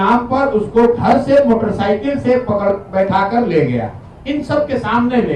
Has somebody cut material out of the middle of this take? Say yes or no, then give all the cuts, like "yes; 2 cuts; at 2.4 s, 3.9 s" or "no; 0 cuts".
no; 0 cuts